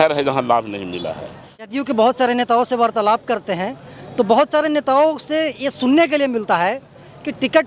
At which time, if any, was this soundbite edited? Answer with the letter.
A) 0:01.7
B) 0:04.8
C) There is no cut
A